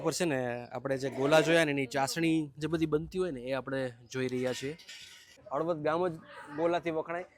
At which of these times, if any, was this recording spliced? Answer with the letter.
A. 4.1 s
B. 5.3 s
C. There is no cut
B